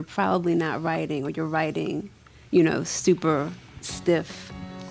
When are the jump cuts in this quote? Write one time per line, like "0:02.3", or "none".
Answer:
none